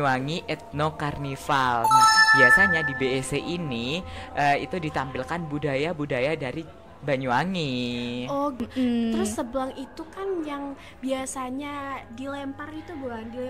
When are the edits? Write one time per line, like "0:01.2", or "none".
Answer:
0:08.6